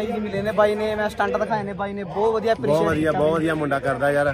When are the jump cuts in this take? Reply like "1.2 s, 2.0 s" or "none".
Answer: none